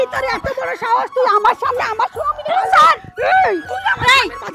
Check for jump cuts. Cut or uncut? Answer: uncut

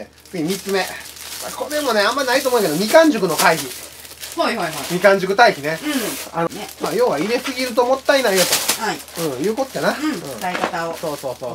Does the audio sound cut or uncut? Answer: cut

